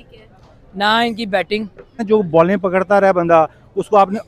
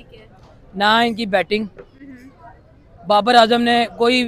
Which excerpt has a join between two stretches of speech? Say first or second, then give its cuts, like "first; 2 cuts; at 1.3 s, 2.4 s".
first; 1 cut; at 2.0 s